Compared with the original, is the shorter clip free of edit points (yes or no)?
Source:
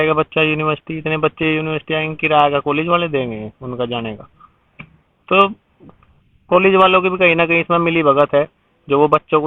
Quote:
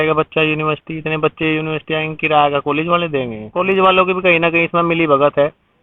no